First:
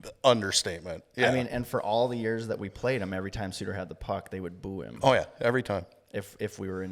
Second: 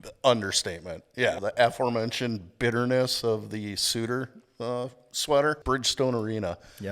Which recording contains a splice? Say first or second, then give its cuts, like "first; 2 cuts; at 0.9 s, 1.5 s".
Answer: second; 2 cuts; at 1.3 s, 5.6 s